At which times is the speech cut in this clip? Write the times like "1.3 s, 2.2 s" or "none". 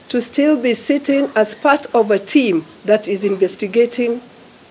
2.7 s